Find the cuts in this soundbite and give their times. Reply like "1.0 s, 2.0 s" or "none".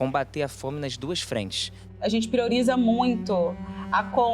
1.8 s